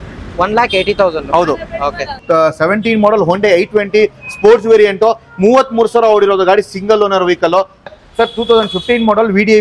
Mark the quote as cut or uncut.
cut